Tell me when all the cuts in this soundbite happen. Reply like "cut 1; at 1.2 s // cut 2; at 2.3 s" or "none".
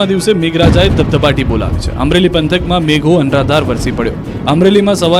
cut 1; at 2.4 s